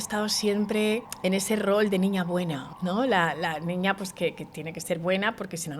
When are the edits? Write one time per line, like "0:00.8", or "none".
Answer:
0:01.1
0:02.7